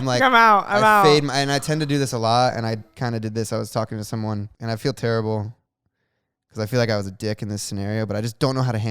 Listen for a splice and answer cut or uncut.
cut